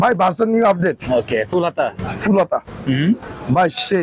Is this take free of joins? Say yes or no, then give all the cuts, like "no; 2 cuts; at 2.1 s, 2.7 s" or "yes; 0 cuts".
yes; 0 cuts